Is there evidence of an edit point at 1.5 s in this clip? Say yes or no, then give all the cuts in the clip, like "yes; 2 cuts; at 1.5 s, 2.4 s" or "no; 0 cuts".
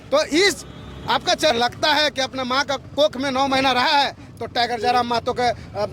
yes; 1 cut; at 1.5 s